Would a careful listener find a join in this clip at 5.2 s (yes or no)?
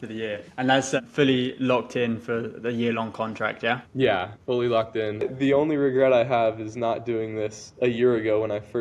yes